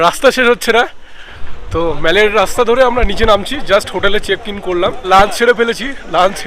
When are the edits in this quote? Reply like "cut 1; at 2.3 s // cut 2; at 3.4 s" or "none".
cut 1; at 1.4 s // cut 2; at 5.0 s